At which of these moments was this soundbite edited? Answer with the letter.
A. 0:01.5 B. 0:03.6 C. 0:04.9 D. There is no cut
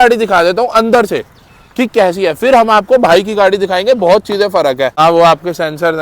C